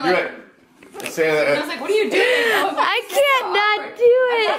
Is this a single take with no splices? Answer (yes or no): yes